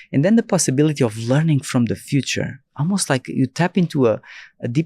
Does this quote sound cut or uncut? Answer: uncut